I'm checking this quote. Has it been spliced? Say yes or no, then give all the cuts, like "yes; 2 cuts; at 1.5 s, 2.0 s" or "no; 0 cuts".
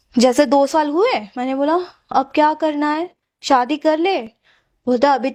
no; 0 cuts